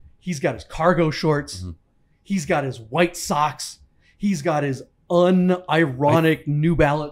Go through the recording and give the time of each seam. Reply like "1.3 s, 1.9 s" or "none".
none